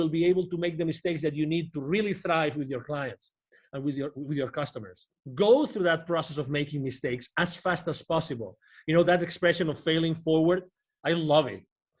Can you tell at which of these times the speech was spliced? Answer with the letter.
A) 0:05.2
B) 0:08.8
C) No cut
A